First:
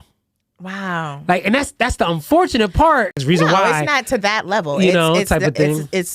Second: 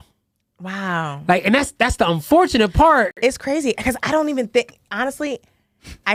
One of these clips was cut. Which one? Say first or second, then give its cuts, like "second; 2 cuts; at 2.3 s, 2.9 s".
first; 1 cut; at 3.2 s